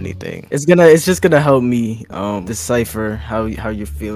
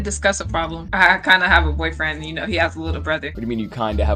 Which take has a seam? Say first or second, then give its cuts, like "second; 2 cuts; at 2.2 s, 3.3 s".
second; 2 cuts; at 0.9 s, 3.3 s